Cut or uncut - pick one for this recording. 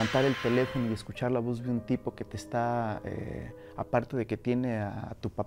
uncut